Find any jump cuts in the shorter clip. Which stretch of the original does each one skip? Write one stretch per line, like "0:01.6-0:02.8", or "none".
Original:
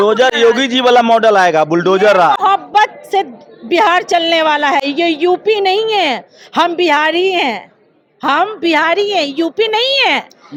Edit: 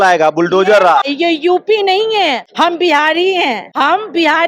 0:02.4-0:04.8
0:06.2-0:06.4
0:07.6-0:08.1